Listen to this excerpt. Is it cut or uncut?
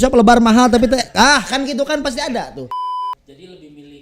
cut